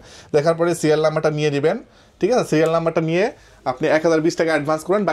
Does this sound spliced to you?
no; 0 cuts

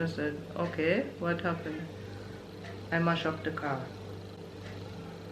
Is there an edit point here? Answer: no; 0 cuts

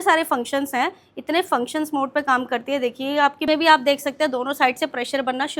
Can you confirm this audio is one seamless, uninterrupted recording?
no; 1 cut; at 3.5 s

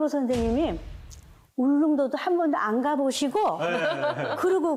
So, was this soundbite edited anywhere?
no; 0 cuts

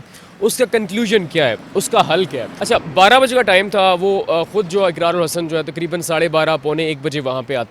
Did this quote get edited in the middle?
yes; 1 cut; at 2.5 s

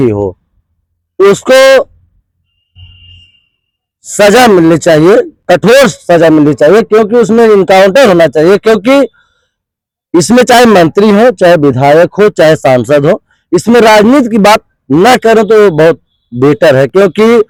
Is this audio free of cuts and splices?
yes; 0 cuts

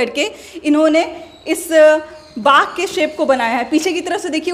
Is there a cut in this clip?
no; 0 cuts

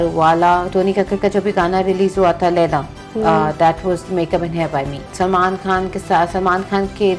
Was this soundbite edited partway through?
yes; 1 cut; at 5.0 s

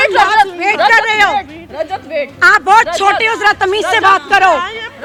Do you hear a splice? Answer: no; 0 cuts

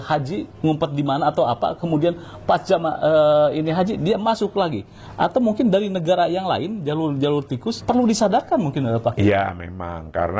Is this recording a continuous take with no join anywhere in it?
no; 1 cut; at 7.7 s

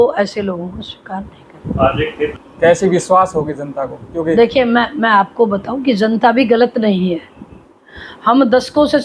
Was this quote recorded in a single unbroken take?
no; 1 cut; at 2.4 s

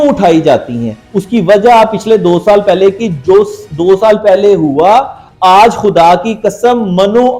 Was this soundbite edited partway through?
no; 0 cuts

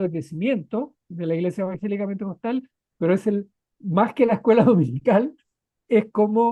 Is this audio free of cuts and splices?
yes; 0 cuts

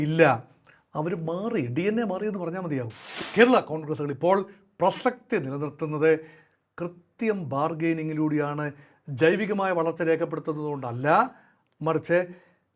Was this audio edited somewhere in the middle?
yes; 1 cut; at 3.2 s

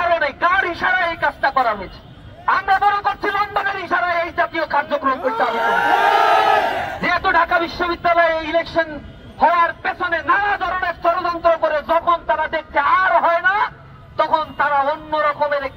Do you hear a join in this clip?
no; 0 cuts

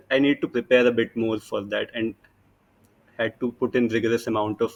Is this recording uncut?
yes; 0 cuts

